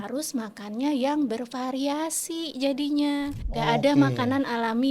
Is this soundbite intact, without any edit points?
no; 1 cut; at 3.4 s

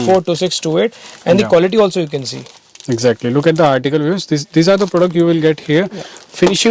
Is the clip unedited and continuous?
yes; 0 cuts

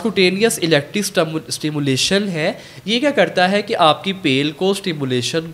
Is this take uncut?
yes; 0 cuts

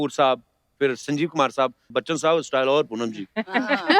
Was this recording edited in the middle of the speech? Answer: yes; 1 cut; at 1.8 s

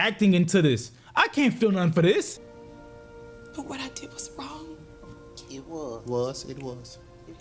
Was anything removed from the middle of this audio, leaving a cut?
no; 0 cuts

